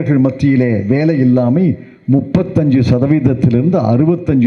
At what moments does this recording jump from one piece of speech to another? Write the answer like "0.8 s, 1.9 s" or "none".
none